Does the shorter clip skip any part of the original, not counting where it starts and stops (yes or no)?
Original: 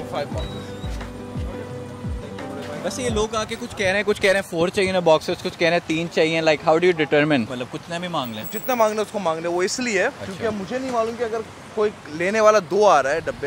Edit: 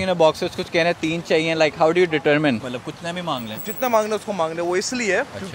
no